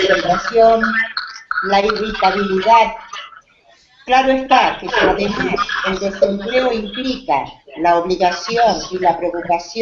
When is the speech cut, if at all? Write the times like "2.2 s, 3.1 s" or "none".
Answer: 4.2 s